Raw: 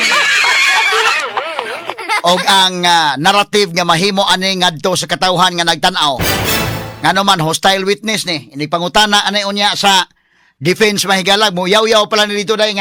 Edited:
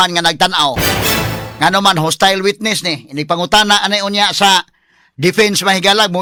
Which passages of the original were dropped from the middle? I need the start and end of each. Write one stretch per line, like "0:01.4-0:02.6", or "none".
none